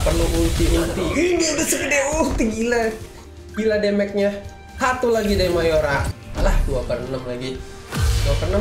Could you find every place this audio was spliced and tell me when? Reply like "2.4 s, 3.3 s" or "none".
6.2 s